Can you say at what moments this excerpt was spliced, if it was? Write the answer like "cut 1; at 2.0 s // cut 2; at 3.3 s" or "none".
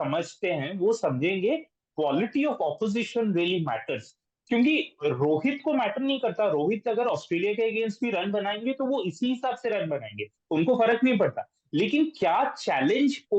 none